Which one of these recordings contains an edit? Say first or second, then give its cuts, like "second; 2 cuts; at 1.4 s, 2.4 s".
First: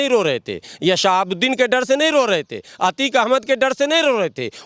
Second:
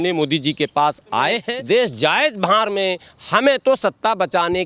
second; 1 cut; at 1.5 s